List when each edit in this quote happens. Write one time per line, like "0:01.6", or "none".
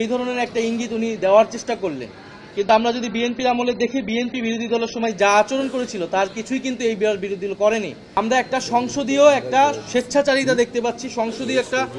0:08.0